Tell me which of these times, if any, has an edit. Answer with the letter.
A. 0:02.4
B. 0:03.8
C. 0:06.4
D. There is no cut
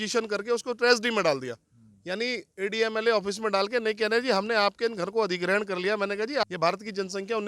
C